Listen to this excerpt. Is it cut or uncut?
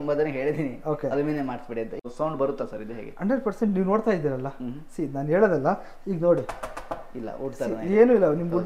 cut